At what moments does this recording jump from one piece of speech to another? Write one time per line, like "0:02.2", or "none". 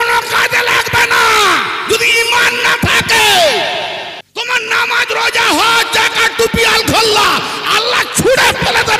0:04.2